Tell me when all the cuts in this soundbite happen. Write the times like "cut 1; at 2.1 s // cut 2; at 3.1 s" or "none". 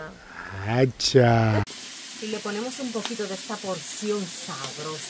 cut 1; at 1.7 s